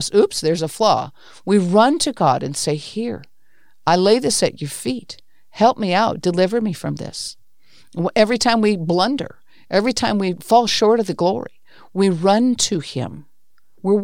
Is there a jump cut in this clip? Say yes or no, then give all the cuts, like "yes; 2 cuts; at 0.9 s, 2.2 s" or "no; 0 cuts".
yes; 1 cut; at 10.4 s